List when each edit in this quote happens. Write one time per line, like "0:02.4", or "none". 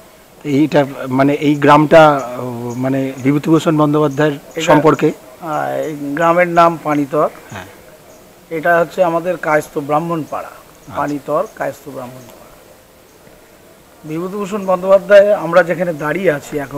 none